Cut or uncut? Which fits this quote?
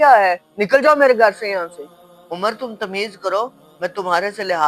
uncut